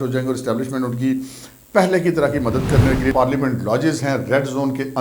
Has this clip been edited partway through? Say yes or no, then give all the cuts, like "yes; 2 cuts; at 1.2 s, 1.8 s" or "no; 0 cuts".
yes; 1 cut; at 3.1 s